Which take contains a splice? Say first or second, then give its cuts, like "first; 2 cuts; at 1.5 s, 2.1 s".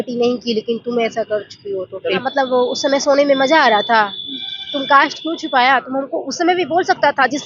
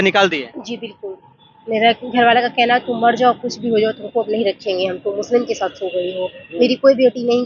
first; 1 cut; at 2.2 s